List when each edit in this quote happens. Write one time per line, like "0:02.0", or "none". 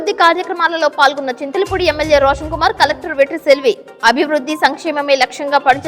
none